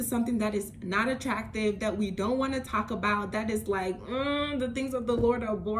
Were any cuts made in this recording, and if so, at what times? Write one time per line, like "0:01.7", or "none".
none